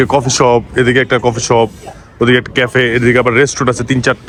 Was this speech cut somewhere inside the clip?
no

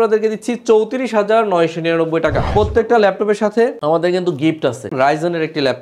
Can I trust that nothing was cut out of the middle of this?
no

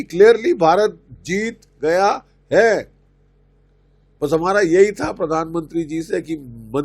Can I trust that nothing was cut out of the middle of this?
yes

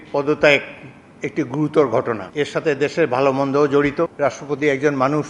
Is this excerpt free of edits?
no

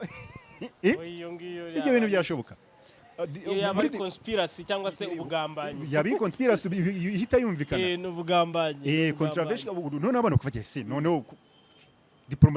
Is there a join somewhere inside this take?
no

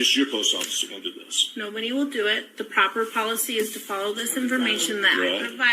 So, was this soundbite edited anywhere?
no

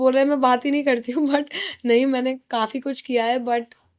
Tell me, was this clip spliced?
no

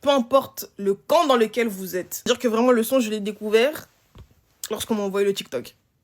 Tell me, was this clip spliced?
yes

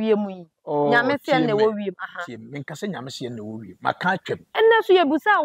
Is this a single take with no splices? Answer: no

